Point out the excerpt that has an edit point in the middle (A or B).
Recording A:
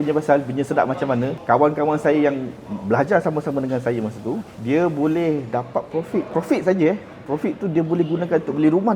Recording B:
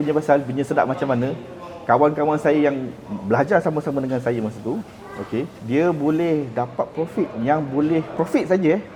A